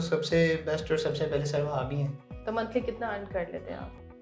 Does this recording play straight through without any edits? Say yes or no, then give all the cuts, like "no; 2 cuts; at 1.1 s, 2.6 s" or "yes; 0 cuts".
no; 1 cut; at 2.3 s